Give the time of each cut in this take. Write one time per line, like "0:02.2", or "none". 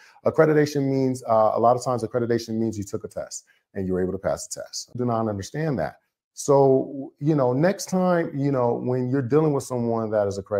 0:05.0